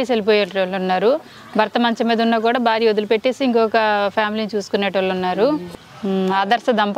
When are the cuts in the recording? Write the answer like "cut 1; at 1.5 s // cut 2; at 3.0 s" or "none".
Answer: cut 1; at 5.7 s